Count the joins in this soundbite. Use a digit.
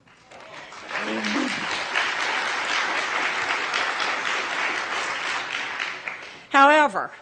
1